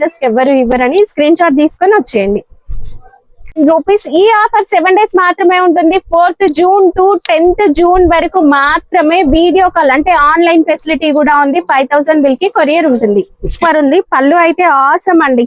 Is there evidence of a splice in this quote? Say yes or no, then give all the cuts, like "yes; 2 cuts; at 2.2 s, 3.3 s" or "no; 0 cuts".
yes; 2 cuts; at 3.5 s, 13.5 s